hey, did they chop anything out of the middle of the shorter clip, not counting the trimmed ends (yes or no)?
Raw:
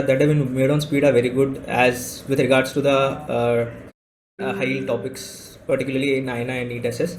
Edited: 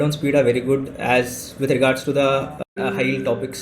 yes